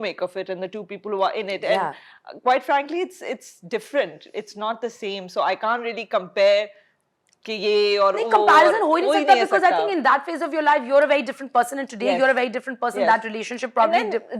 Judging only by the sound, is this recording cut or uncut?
uncut